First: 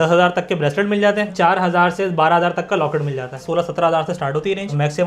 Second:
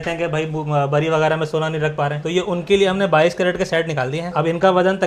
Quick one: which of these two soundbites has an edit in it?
first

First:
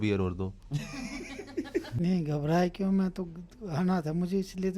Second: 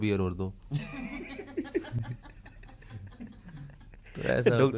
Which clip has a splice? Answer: first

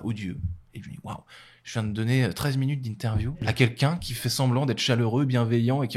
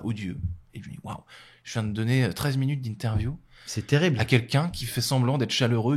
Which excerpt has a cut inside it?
first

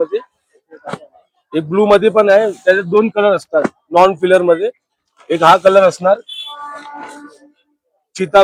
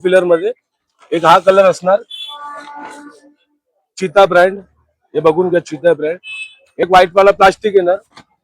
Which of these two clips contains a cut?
second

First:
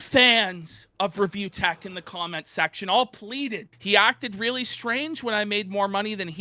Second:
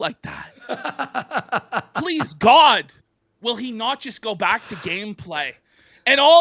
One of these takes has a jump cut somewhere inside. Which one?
first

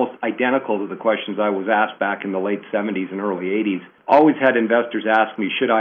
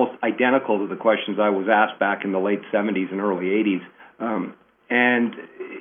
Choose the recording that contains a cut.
first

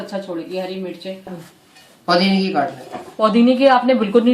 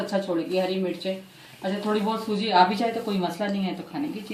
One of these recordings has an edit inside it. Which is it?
first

